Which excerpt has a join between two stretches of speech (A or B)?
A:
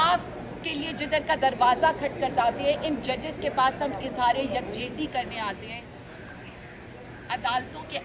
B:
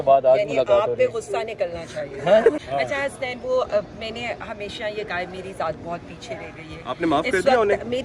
B